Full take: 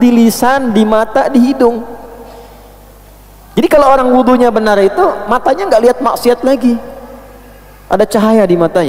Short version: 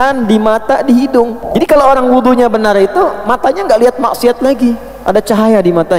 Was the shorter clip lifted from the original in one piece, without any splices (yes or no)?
no